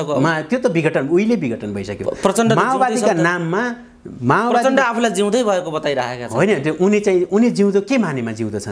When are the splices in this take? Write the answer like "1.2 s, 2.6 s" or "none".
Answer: none